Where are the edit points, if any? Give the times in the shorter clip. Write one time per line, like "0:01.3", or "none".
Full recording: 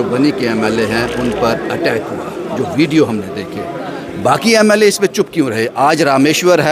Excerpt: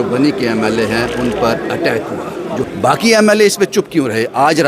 0:02.7